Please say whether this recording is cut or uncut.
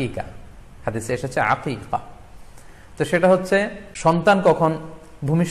cut